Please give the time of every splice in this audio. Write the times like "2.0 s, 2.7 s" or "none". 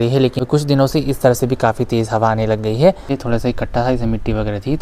3.2 s